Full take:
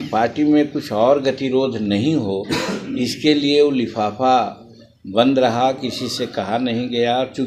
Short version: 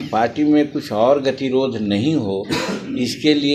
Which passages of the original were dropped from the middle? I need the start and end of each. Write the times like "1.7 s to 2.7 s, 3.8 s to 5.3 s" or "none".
none